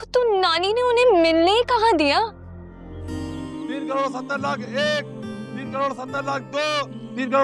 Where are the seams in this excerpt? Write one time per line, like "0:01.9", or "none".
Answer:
0:02.9